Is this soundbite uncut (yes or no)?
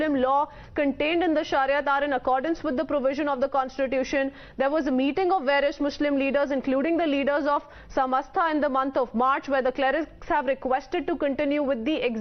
yes